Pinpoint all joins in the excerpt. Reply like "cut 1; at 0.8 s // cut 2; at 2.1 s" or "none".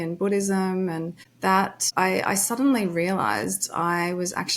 cut 1; at 1.6 s

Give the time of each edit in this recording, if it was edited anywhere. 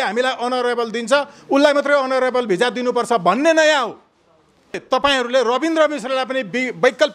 cut 1; at 4.8 s

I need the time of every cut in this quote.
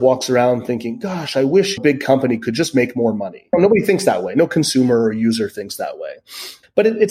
cut 1; at 1.8 s // cut 2; at 3.5 s

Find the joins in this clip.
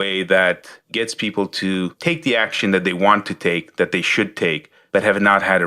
cut 1; at 4.7 s

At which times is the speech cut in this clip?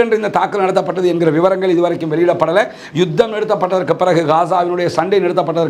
none

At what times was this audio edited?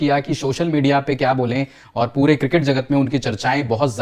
none

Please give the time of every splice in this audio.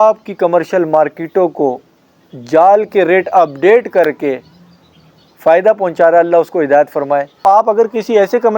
cut 1; at 7.4 s

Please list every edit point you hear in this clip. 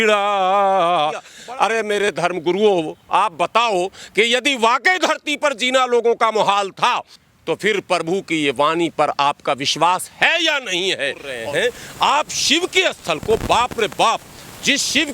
cut 1; at 1.3 s // cut 2; at 7.1 s // cut 3; at 11.3 s

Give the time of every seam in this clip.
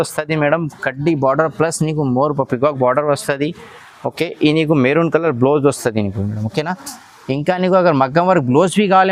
none

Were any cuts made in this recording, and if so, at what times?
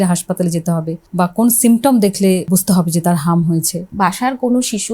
cut 1; at 1.0 s // cut 2; at 2.5 s // cut 3; at 3.9 s

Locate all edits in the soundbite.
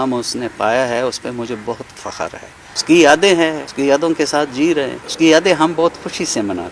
cut 1; at 2.6 s

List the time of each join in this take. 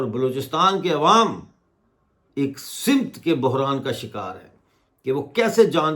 none

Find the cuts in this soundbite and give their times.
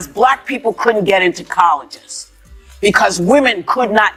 none

